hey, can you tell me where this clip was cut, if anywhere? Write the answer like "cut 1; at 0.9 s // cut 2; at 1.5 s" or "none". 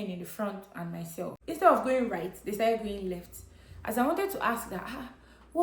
cut 1; at 1.4 s